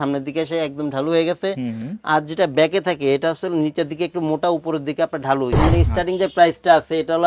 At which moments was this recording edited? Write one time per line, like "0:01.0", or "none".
0:05.6